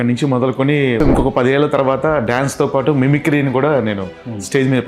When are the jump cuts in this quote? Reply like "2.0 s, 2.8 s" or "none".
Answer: 1.0 s